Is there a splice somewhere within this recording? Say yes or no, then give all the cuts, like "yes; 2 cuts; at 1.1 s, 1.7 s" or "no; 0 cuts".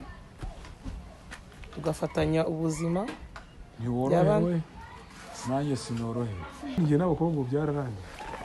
yes; 1 cut; at 6.8 s